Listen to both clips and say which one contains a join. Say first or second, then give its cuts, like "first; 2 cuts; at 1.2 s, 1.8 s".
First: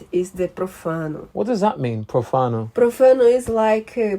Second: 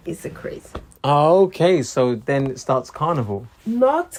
first; 2 cuts; at 1.2 s, 2.6 s